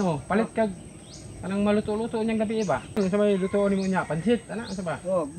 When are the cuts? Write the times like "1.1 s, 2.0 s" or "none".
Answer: 3.1 s